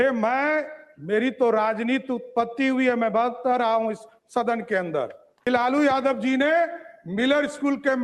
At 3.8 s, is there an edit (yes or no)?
no